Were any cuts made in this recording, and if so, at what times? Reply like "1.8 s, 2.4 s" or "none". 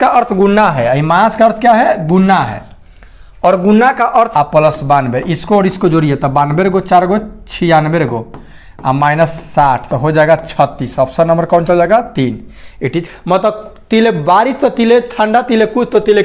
4.3 s, 13.1 s